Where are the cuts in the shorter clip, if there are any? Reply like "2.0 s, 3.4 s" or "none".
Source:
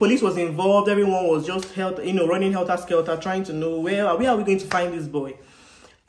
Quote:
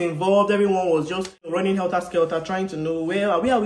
1.5 s